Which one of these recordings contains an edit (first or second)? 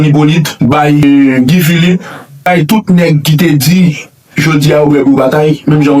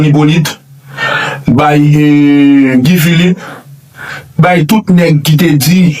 first